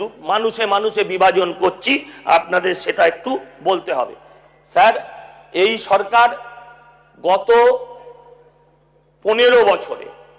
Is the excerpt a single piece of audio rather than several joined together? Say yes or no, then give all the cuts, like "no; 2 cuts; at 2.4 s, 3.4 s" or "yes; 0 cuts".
yes; 0 cuts